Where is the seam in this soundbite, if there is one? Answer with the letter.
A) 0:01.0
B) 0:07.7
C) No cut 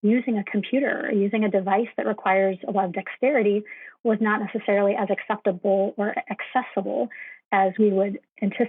B